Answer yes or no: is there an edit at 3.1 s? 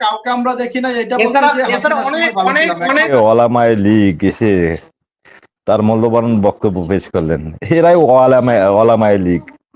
yes